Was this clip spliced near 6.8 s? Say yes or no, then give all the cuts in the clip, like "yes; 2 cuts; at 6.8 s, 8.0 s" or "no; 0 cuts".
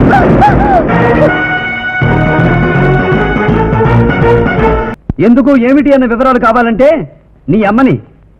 no; 1 cut; at 4.9 s